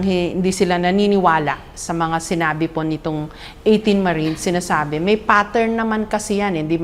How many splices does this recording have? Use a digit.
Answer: 0